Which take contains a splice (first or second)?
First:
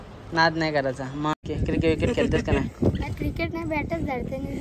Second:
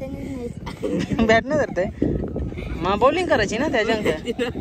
first